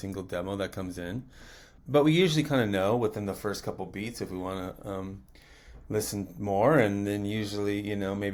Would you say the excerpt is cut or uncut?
uncut